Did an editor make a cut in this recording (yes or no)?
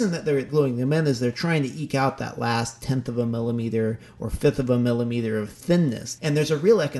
yes